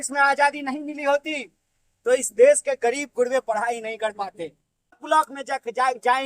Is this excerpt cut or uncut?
cut